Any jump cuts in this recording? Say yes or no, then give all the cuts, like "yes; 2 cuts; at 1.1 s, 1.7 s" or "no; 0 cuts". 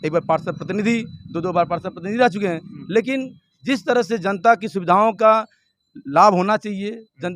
no; 0 cuts